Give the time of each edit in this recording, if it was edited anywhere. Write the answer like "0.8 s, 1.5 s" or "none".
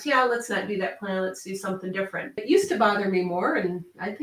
2.4 s